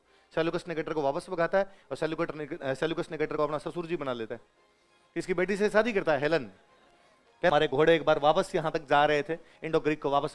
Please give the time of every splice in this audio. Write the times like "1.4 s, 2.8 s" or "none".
7.5 s